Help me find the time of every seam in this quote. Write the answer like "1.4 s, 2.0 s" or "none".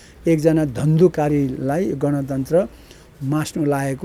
none